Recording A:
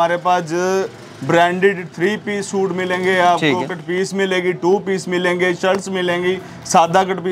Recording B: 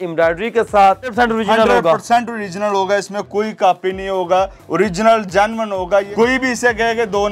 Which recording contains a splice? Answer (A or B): B